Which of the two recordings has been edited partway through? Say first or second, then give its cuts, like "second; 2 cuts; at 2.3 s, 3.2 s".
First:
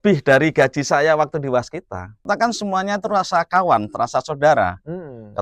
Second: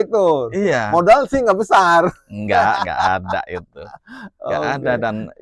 first; 1 cut; at 2.2 s